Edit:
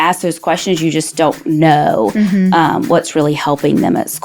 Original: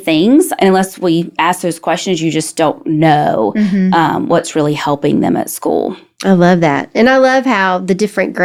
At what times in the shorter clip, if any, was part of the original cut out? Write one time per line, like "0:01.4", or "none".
none